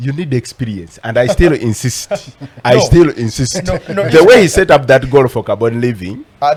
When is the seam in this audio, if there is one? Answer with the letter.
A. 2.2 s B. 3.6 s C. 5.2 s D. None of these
D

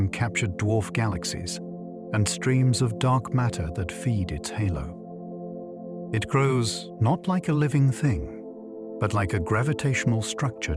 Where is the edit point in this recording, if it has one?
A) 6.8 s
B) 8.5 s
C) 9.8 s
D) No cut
A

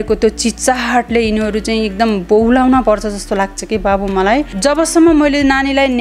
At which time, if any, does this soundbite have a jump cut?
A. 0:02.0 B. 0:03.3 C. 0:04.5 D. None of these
C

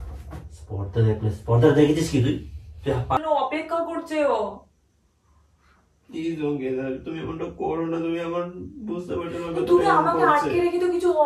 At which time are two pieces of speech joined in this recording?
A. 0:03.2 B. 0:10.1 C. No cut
A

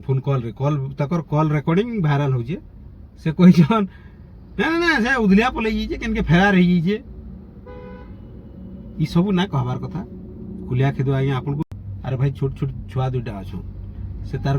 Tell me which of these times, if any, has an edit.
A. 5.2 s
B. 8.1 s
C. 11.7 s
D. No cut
C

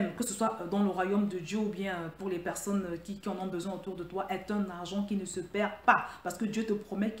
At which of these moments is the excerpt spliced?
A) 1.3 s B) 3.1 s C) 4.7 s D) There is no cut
D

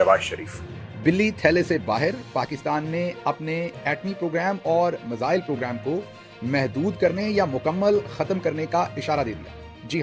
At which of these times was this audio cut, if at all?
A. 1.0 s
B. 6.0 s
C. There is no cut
A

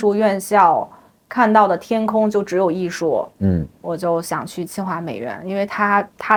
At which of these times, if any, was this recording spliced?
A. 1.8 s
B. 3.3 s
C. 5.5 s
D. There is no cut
D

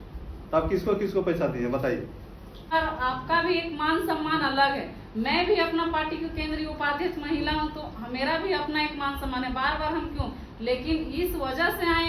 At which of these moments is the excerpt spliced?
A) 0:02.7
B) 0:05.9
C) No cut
A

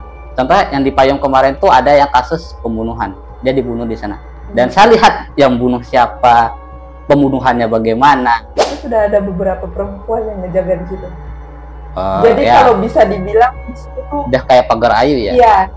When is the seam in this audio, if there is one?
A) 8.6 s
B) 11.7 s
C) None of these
A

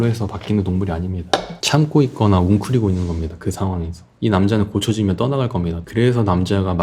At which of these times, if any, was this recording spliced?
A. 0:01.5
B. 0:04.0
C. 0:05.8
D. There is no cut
B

